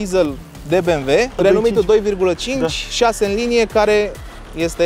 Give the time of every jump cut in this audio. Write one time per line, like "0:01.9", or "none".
0:01.4